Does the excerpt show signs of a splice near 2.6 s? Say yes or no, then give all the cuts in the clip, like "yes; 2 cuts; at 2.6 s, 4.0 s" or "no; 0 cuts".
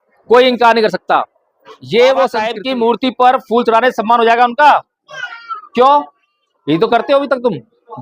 yes; 1 cut; at 2.6 s